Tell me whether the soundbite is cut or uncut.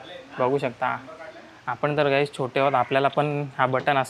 uncut